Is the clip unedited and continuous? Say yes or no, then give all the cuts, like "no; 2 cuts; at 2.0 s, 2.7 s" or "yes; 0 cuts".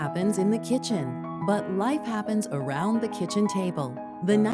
yes; 0 cuts